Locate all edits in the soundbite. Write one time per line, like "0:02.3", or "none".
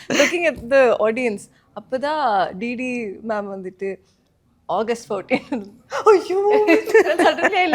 none